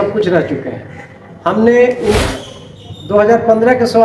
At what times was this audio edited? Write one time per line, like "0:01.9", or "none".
0:02.2